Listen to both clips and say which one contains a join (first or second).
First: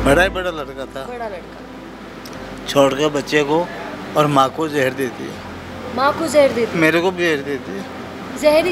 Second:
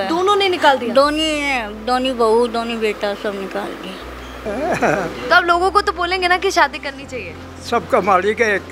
second